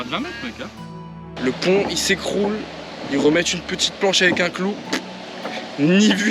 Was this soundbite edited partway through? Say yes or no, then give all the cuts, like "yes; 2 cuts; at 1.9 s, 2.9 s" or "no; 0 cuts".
yes; 1 cut; at 1.3 s